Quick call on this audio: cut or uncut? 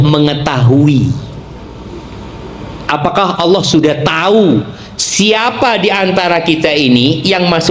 uncut